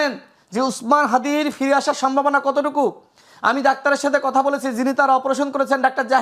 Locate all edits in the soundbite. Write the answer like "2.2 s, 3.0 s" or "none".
none